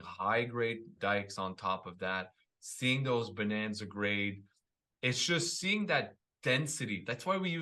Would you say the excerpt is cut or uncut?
cut